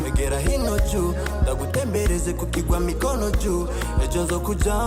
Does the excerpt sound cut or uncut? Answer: uncut